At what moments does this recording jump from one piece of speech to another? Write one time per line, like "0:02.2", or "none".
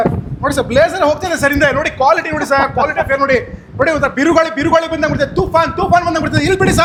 none